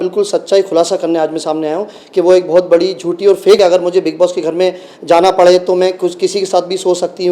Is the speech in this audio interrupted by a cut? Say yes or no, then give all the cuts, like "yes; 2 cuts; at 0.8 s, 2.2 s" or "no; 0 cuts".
yes; 1 cut; at 3.6 s